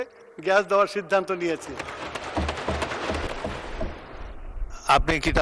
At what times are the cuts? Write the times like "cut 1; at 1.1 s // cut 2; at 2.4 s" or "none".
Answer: cut 1; at 3.3 s